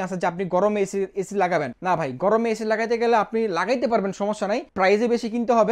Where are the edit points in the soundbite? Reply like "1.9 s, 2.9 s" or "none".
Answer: 1.7 s, 4.7 s